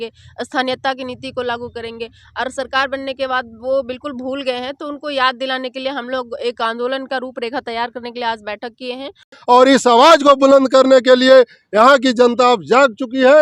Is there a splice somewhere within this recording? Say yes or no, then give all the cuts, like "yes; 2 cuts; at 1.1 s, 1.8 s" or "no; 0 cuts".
yes; 1 cut; at 9.4 s